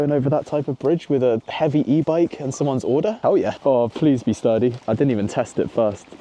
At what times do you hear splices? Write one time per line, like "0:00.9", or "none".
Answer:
none